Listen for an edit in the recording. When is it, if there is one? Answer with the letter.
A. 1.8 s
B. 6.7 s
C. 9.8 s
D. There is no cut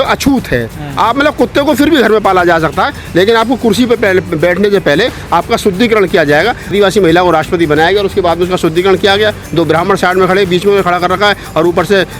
B